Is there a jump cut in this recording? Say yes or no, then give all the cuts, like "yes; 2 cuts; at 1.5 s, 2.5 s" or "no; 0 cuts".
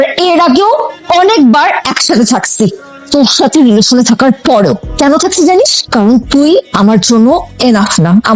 no; 0 cuts